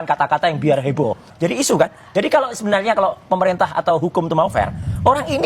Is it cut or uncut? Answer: uncut